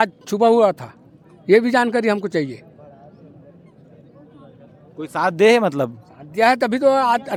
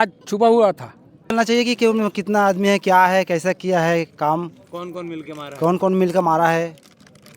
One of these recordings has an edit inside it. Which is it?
second; 1 cut; at 1.3 s

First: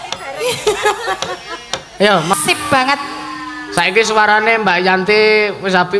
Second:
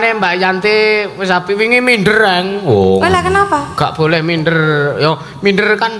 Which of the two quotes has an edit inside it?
first; 1 cut; at 2.3 s

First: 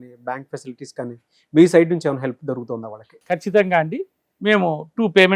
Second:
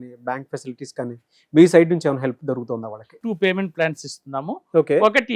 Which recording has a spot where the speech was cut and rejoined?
second; 1 cut; at 3.1 s

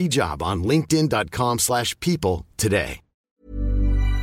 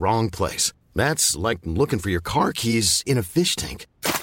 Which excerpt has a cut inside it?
first; 1 cut; at 3.3 s

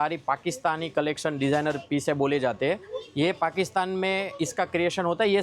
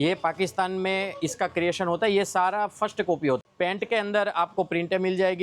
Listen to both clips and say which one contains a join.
second; 1 cut; at 3.4 s

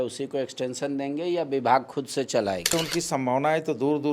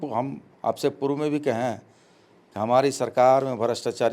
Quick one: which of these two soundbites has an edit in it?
first; 1 cut; at 2.7 s

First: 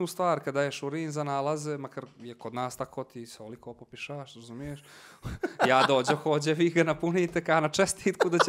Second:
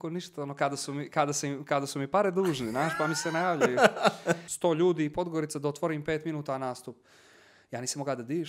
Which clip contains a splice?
second; 1 cut; at 4.5 s

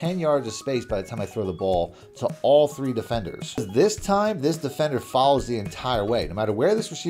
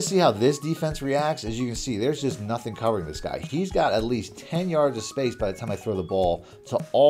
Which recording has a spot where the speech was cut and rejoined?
first; 1 cut; at 3.7 s

